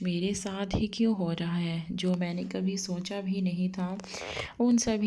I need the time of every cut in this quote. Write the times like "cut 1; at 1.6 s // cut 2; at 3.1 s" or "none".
none